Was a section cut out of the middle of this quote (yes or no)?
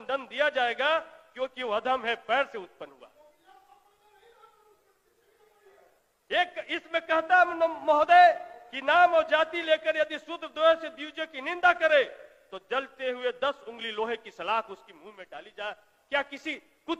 no